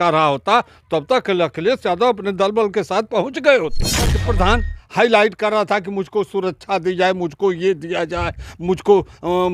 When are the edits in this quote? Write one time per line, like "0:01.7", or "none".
0:04.1